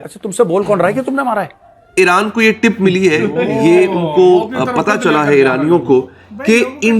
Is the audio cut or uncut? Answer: cut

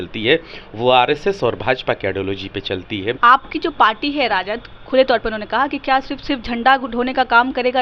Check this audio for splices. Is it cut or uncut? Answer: cut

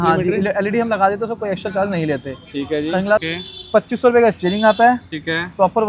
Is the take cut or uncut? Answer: cut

